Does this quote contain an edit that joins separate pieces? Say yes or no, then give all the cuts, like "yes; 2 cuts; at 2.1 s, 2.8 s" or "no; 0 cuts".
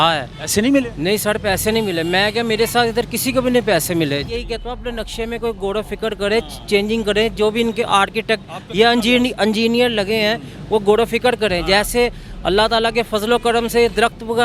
yes; 1 cut; at 4.2 s